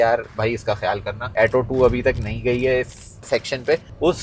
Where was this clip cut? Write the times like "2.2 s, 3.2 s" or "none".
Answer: 0.7 s, 3.3 s